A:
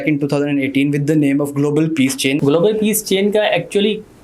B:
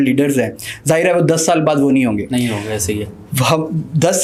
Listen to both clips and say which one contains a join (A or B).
A